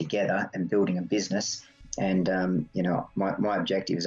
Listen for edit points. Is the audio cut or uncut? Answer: cut